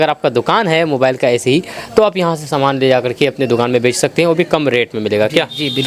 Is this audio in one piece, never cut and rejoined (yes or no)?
yes